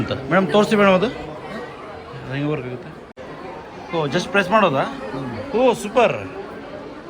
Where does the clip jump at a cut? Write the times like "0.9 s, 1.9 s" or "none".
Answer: 3.1 s